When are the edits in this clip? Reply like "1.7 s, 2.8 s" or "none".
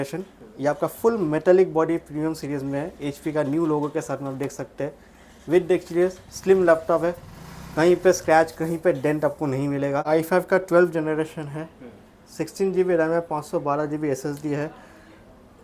10.1 s